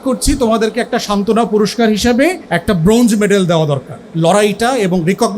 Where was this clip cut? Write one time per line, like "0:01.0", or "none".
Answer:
0:02.5
0:04.0